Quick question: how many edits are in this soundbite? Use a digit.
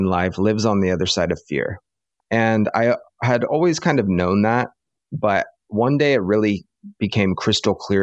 1